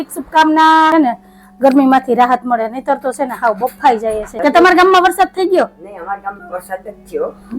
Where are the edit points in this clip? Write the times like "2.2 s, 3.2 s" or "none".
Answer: 0.9 s, 4.2 s

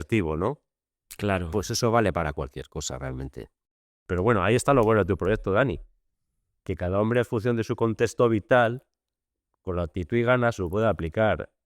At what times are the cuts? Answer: 3.9 s

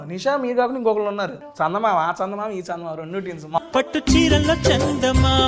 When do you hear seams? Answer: 1.4 s, 3.6 s

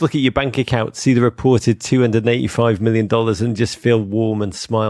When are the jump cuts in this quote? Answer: none

